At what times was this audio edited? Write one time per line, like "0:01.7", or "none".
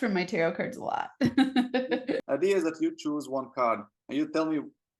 0:02.2